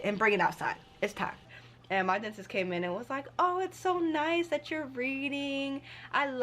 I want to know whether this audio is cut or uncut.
cut